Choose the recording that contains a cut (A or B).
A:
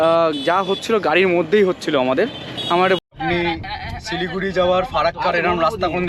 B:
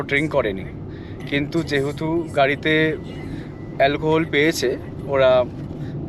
A